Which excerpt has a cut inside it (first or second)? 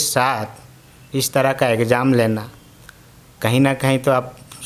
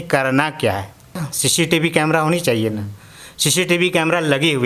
second